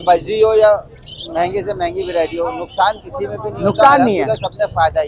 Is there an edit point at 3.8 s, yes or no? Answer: no